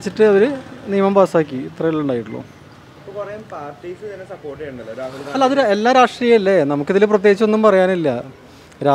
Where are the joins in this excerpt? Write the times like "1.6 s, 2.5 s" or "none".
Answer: none